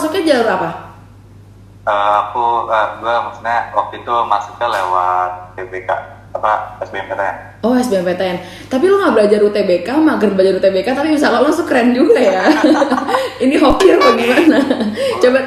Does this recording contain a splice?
no; 0 cuts

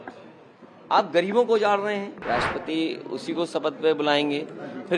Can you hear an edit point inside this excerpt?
yes; 1 cut; at 2.2 s

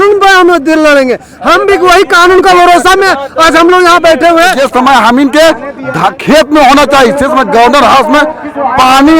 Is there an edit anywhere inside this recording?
yes; 1 cut; at 4.6 s

